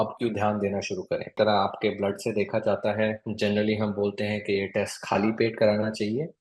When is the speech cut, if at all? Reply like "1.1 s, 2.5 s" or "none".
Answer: 1.4 s